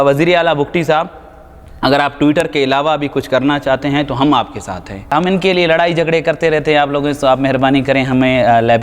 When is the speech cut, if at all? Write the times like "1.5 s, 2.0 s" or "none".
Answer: 5.1 s